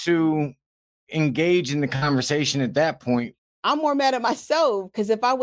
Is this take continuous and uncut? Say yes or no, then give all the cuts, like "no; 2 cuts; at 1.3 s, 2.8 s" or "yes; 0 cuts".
no; 1 cut; at 3.4 s